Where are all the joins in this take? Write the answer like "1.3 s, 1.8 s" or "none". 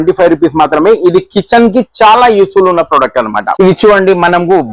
3.5 s